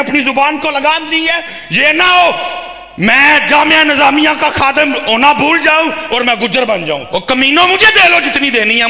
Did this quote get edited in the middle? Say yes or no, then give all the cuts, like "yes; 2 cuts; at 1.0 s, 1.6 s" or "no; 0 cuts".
yes; 1 cut; at 7.0 s